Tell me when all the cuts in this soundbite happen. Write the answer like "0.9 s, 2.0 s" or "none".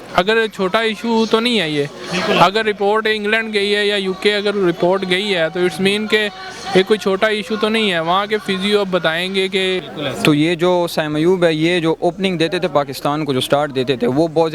9.9 s

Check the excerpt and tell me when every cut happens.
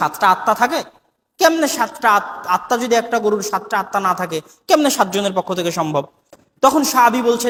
none

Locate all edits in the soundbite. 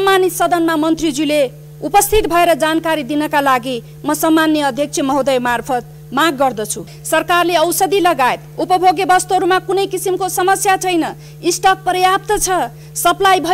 6.9 s

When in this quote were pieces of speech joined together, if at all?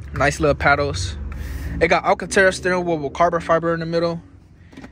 none

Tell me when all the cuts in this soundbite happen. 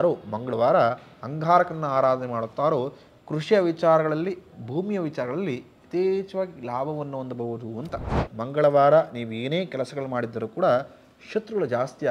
8.2 s

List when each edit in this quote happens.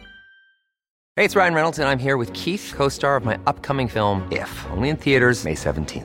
1.0 s

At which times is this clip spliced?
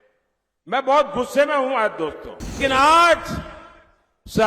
2.6 s

